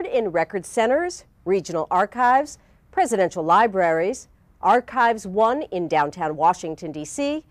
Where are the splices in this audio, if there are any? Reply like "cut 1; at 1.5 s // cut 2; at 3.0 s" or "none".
none